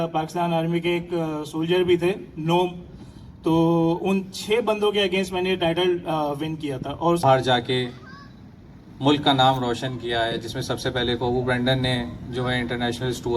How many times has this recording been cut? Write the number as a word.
one